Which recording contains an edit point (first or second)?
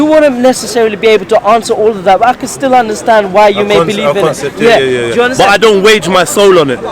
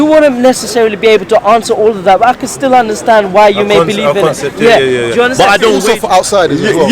second